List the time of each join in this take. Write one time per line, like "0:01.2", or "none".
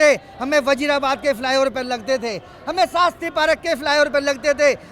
none